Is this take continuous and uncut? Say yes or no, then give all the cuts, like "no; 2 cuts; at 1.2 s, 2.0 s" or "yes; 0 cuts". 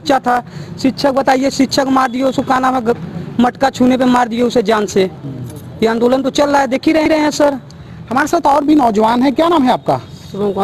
yes; 0 cuts